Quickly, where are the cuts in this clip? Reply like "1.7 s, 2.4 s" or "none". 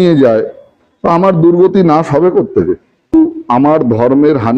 3.1 s

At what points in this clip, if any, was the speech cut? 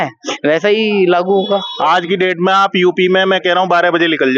1.7 s

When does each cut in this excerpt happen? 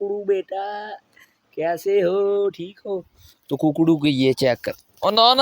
none

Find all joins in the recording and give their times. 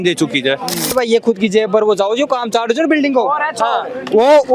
0.9 s

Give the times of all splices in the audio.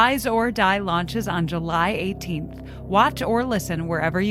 none

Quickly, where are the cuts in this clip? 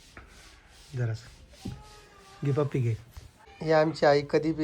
3.4 s

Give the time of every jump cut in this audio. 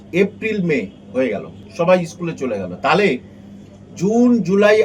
1.6 s

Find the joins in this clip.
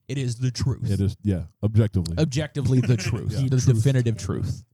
none

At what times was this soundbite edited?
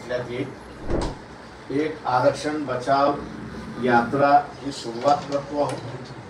0.9 s

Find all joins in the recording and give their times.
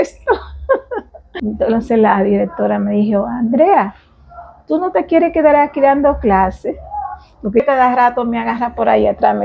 1.2 s, 7.6 s

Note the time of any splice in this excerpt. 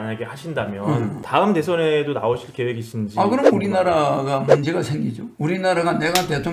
none

